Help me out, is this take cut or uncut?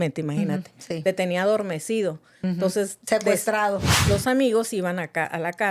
cut